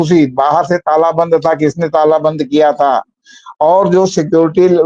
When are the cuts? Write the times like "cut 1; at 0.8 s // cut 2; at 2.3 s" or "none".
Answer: none

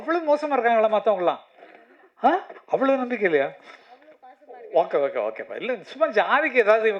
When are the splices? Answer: none

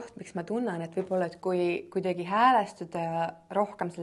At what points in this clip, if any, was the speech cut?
none

